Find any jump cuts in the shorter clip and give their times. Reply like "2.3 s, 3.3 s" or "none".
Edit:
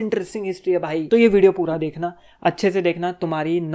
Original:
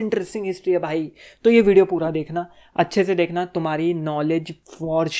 1.0 s